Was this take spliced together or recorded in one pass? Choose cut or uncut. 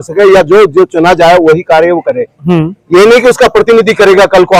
uncut